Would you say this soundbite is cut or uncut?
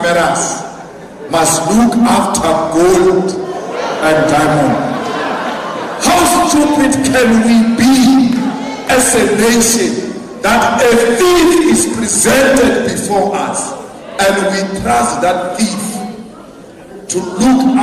uncut